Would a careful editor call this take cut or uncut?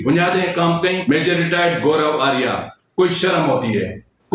cut